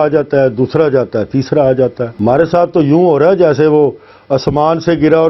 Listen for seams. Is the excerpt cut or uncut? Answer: cut